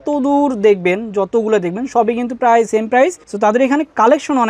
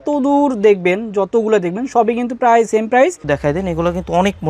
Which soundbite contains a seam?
second; 1 cut; at 3.2 s

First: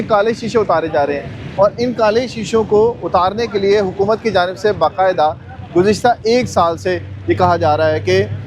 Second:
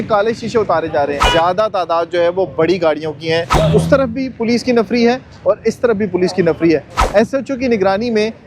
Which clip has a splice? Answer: second; 2 cuts; at 1.2 s, 3.5 s

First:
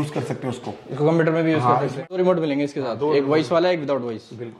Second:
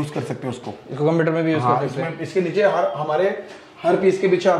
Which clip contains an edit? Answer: first; 1 cut; at 2.2 s

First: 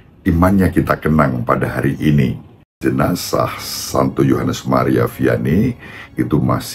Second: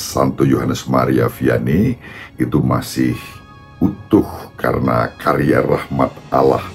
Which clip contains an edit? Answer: first; 1 cut; at 2.8 s

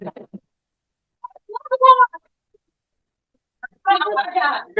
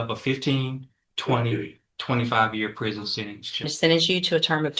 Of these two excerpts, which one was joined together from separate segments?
second; 1 cut; at 3.7 s

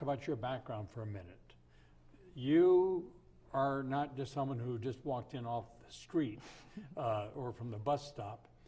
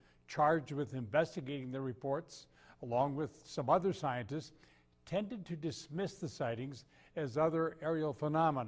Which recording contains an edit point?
second; 1 cut; at 3.4 s

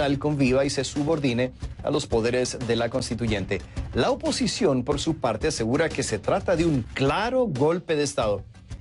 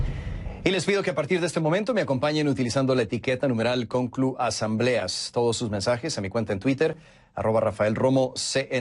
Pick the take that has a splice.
first; 1 cut; at 1.7 s

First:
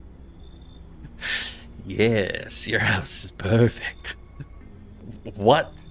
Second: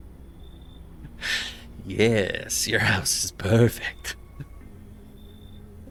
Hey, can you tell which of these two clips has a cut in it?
first; 1 cut; at 5.0 s

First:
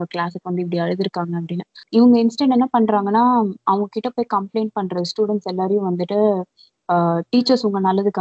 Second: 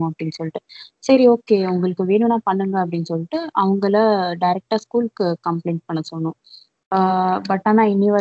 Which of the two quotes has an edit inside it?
first; 1 cut; at 1.7 s

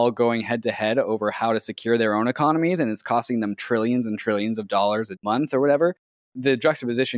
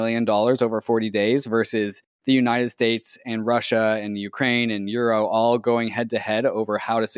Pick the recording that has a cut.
first; 2 cuts; at 5.2 s, 6.3 s

